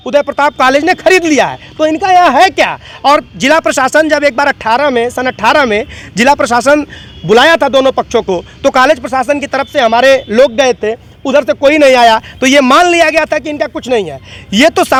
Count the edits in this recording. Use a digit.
0